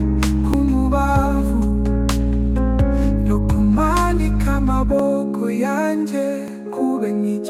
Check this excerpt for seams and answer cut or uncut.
uncut